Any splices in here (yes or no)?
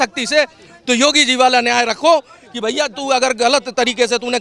no